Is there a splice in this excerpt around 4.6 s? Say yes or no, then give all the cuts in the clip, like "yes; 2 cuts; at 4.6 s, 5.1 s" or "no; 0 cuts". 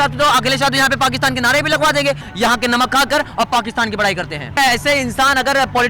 yes; 2 cuts; at 2.3 s, 4.6 s